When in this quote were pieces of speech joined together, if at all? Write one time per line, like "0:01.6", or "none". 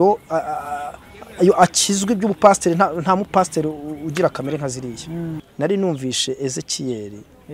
0:05.4